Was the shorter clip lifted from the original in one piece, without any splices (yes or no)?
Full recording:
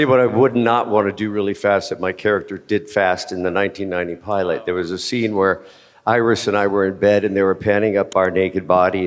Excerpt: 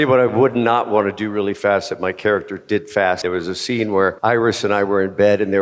no